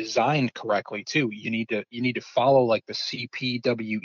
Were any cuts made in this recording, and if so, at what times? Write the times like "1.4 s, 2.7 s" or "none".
none